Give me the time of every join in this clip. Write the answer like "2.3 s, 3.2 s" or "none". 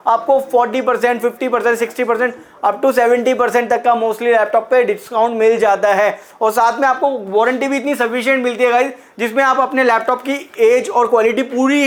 none